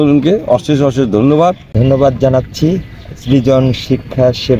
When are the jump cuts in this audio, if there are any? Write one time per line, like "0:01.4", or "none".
0:01.7